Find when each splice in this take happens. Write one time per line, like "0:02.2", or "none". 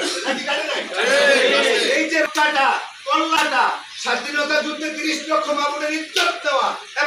0:02.3
0:03.4